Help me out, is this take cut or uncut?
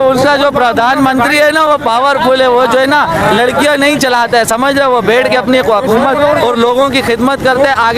uncut